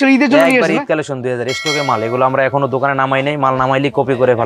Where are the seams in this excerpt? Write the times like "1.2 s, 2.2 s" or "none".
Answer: none